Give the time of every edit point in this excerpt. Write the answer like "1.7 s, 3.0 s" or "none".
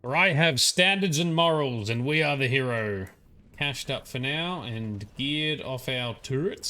3.5 s

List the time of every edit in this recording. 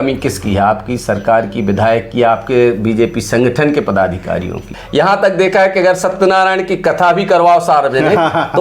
4.7 s

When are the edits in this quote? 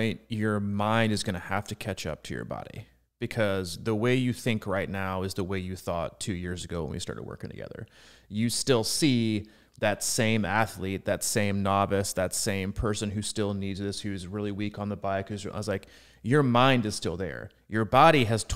none

